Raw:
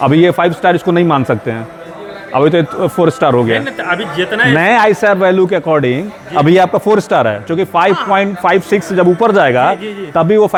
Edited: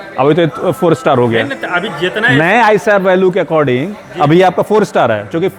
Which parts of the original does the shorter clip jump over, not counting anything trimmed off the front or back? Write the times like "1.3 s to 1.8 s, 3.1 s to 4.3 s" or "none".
none